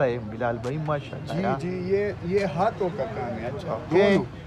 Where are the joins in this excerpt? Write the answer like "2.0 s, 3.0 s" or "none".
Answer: none